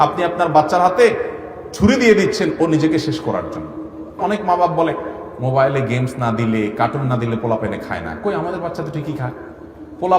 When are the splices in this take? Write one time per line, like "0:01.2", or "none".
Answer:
0:04.2